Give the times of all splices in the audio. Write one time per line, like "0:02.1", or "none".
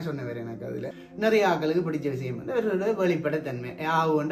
0:01.0